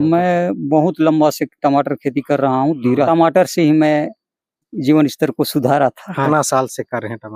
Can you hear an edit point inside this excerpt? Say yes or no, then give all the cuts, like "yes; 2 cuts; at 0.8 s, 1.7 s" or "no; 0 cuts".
yes; 3 cuts; at 3.1 s, 4.7 s, 6.3 s